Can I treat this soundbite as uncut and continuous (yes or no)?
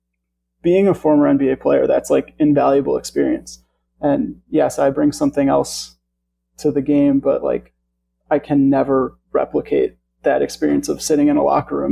yes